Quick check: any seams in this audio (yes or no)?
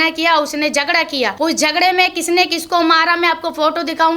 yes